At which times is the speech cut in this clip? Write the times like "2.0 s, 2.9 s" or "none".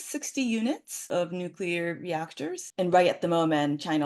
1.0 s